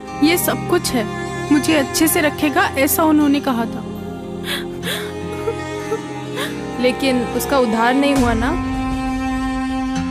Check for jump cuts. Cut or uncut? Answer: uncut